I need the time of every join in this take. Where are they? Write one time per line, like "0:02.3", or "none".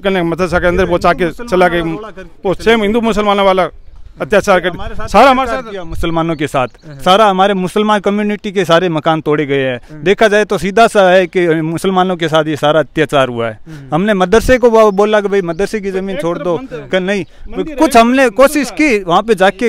none